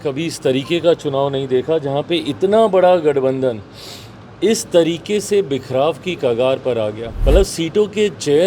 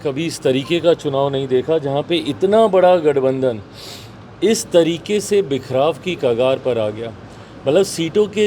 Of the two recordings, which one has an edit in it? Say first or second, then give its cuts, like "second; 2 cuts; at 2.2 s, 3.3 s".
first; 1 cut; at 7.1 s